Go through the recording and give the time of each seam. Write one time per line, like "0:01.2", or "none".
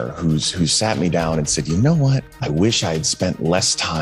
0:02.3

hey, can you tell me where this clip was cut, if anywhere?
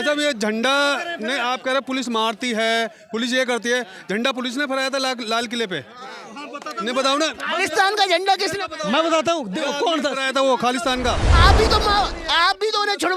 0:11.3

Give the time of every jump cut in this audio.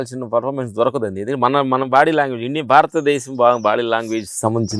none

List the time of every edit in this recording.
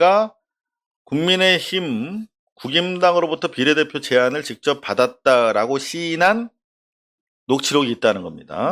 none

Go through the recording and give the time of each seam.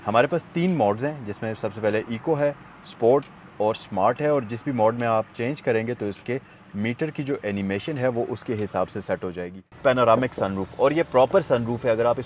0:09.7

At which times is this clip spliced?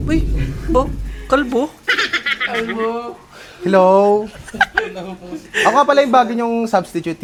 none

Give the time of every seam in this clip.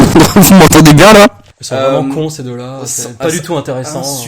0:01.5

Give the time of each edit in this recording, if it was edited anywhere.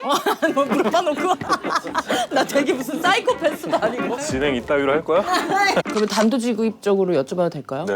0:05.5

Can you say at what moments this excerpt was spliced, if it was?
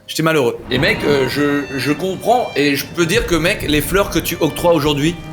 none

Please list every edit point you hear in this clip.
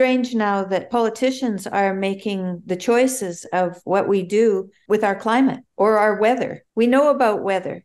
0:04.7
0:05.6
0:06.6

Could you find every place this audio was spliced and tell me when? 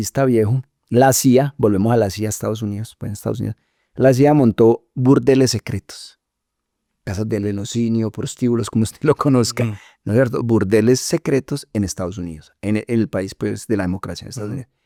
none

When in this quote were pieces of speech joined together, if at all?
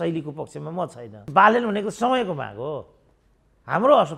0:01.3

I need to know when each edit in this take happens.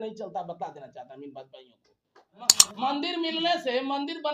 0:02.6

